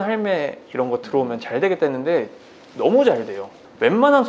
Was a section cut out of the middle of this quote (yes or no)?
no